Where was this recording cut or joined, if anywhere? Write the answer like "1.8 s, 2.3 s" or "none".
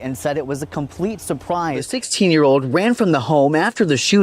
2.0 s